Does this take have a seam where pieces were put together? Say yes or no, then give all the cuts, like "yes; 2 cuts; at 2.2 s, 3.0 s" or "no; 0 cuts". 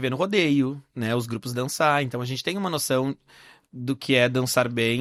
no; 0 cuts